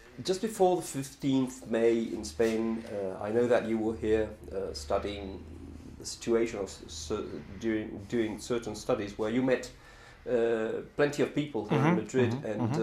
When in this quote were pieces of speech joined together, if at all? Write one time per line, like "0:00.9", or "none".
0:05.3

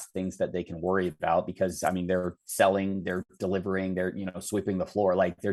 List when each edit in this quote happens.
none

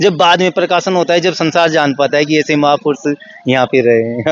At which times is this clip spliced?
none

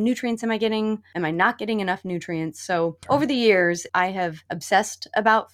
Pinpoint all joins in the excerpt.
0:01.1
0:03.0
0:03.9

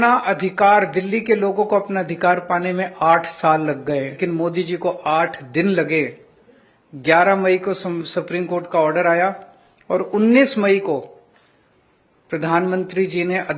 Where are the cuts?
0:04.2

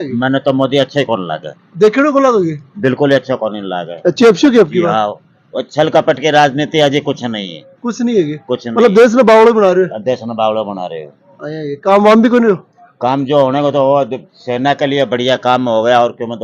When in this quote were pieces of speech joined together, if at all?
none

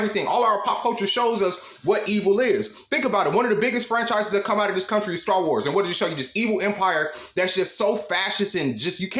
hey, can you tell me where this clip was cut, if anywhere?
0:02.8

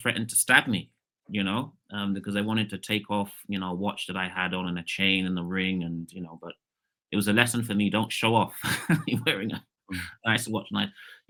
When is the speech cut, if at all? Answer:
none

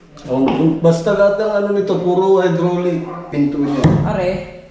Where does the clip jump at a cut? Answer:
0:03.3

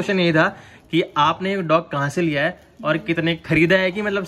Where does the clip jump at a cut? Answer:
none

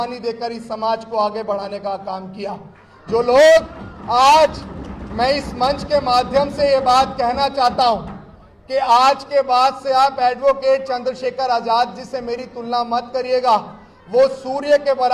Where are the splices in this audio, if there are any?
none

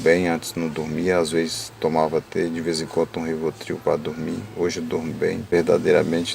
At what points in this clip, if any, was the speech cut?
0:05.4

